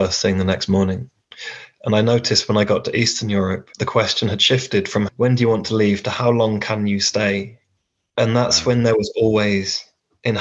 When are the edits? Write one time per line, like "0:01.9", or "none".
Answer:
0:03.7